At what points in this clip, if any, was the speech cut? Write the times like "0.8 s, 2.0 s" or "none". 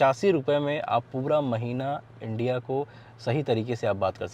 none